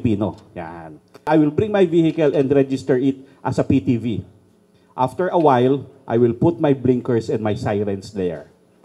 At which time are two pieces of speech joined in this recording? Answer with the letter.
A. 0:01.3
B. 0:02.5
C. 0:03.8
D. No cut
A